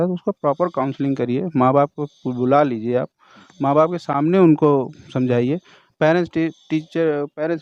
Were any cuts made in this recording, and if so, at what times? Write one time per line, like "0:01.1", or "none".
none